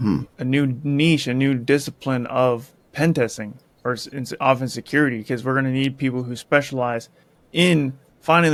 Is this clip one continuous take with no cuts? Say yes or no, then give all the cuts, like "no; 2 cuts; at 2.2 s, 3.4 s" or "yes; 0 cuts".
yes; 0 cuts